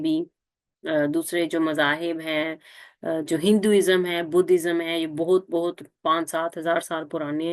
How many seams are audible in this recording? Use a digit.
0